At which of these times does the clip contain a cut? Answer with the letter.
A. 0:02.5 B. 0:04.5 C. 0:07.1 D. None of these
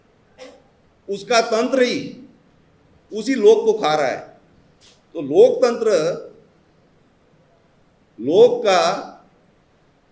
D